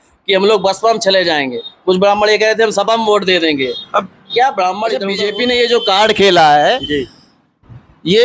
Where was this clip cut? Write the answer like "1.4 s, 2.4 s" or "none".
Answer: 5.1 s

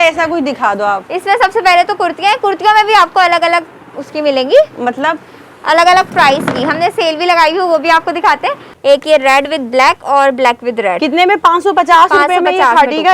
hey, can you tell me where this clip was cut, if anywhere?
8.6 s

